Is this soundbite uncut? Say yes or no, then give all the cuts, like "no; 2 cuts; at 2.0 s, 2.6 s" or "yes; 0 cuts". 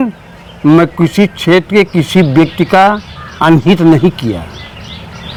yes; 0 cuts